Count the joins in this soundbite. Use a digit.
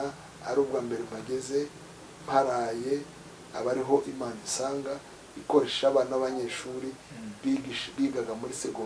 0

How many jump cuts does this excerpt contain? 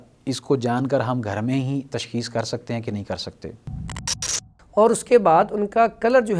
1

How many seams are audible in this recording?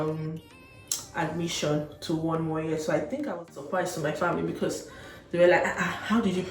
1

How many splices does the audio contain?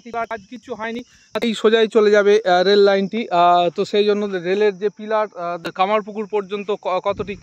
2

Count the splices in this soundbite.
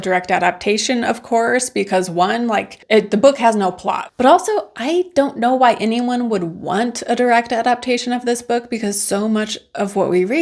1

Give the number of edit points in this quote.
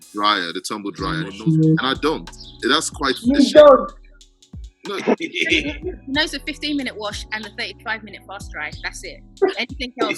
1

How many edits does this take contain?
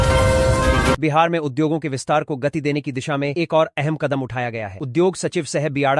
0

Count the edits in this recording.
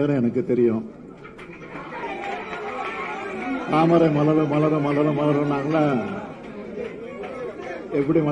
1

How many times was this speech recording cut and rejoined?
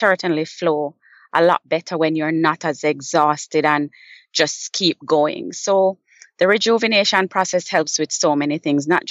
0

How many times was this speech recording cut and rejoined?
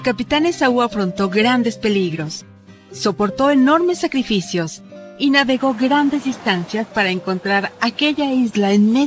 0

